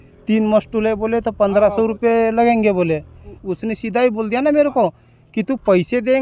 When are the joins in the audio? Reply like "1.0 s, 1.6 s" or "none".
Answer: 3.4 s

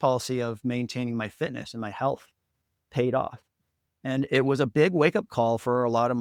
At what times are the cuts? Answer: none

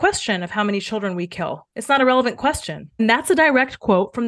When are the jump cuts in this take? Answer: none

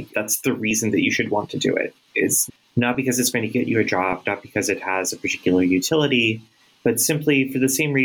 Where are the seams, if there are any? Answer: none

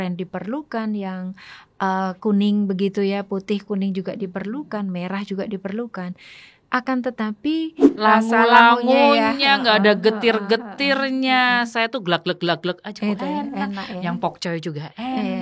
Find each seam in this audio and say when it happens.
7.8 s

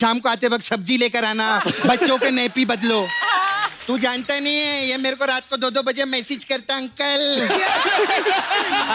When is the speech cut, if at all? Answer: 3.8 s

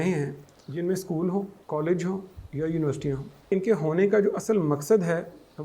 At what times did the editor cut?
1.6 s, 3.4 s

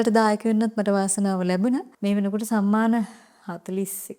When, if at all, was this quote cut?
1.9 s

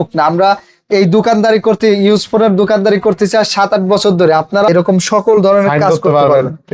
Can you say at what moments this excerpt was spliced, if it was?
4.7 s

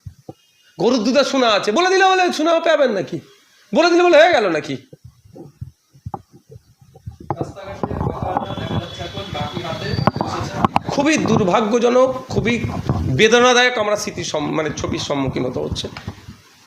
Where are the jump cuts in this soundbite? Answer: none

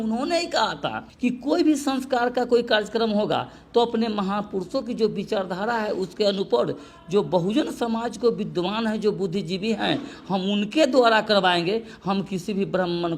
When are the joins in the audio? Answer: none

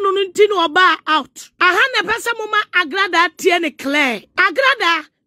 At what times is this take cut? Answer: 1.4 s, 4.3 s

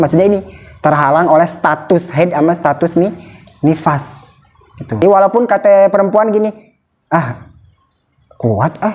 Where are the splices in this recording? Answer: 5.0 s

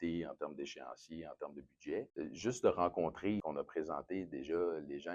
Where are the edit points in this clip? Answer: 2.1 s, 3.4 s

